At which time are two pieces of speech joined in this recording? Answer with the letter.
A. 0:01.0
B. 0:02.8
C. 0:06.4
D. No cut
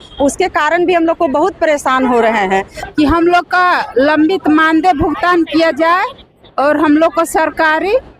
B